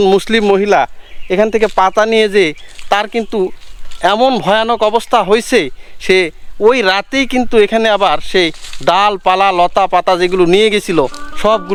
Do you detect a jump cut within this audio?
no; 0 cuts

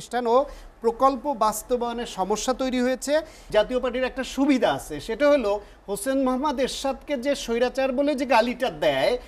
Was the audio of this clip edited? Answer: yes; 1 cut; at 3.4 s

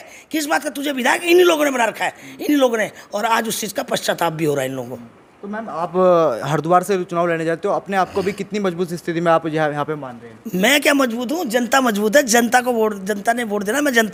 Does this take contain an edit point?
no; 0 cuts

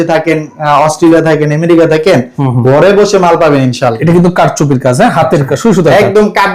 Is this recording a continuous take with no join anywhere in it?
no; 1 cut; at 4.0 s

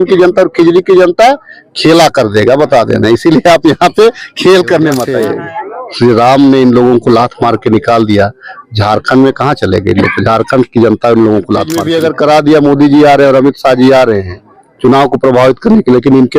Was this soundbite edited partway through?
yes; 2 cuts; at 5.2 s, 11.8 s

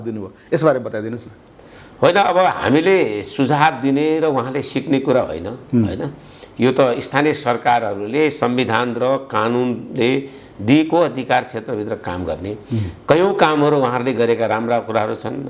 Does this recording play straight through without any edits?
yes; 0 cuts

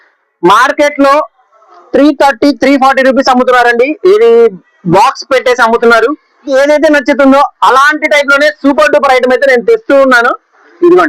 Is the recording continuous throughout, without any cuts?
no; 1 cut; at 6.5 s

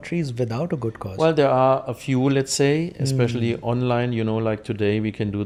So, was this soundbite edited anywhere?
no; 0 cuts

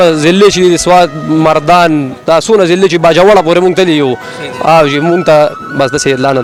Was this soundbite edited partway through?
no; 0 cuts

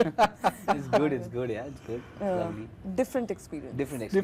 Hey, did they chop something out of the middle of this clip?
no; 0 cuts

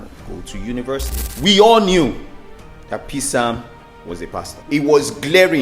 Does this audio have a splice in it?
yes; 2 cuts; at 1.2 s, 4.6 s

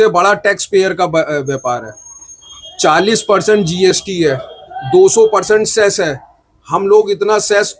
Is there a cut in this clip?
no; 0 cuts

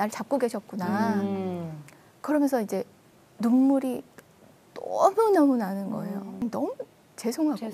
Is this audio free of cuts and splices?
no; 1 cut; at 6.4 s

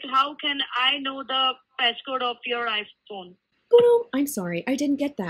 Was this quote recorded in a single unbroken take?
yes; 0 cuts

